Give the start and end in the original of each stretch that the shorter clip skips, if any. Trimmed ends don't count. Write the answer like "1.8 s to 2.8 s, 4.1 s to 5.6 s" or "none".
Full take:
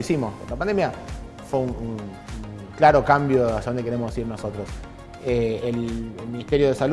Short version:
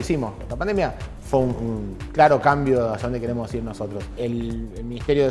1.1 s to 1.3 s, 2.2 s to 2.6 s, 4.8 s to 5.6 s